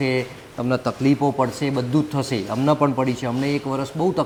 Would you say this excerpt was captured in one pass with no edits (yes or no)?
yes